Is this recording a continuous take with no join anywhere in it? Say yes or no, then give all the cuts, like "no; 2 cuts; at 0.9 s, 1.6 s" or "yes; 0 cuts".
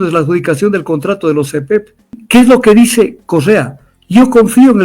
no; 1 cut; at 2.2 s